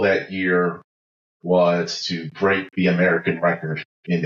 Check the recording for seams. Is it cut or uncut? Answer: uncut